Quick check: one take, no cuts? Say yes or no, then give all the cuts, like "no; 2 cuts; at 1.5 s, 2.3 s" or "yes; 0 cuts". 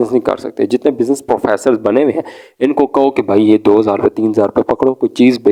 yes; 0 cuts